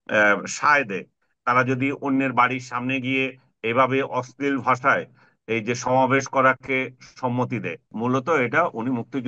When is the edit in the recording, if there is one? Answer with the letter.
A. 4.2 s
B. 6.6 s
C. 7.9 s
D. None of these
C